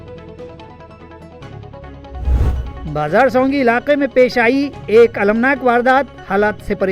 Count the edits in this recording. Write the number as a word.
one